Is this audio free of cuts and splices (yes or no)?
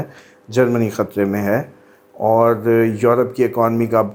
yes